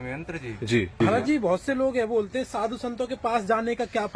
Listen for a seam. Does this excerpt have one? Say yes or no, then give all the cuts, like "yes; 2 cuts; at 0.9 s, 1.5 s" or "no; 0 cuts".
yes; 1 cut; at 1.0 s